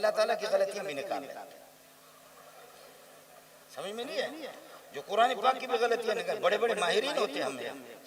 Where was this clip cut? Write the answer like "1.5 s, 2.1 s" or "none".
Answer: none